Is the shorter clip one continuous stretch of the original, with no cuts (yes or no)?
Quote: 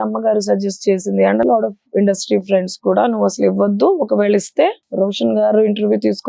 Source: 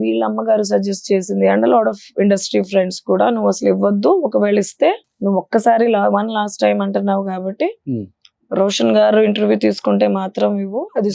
no